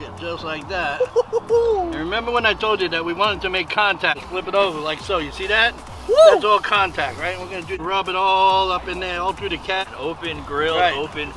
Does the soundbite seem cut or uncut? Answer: cut